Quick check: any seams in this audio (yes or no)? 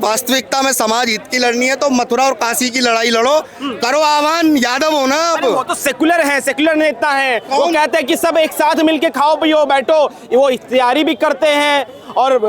no